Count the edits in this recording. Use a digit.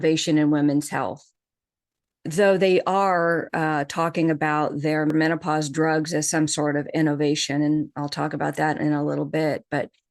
1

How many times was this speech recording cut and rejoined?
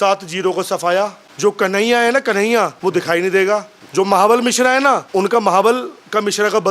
4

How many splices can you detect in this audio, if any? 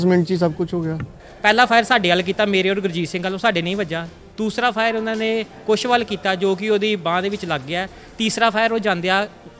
1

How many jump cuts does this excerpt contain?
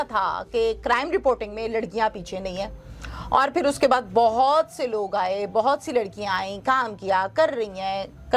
0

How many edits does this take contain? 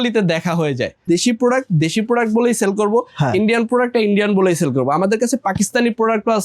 1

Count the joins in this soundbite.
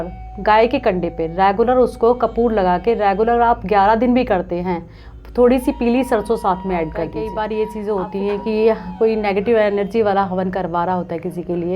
1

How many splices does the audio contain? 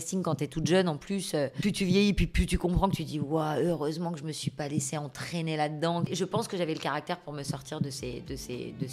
2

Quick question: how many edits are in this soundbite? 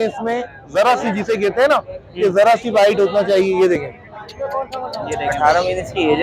1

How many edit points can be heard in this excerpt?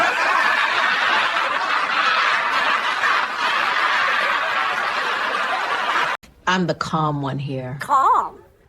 1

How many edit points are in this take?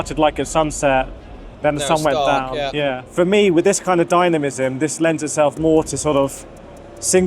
1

